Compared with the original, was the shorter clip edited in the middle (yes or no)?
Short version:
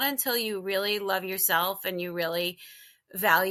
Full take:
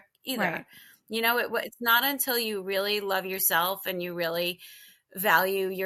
no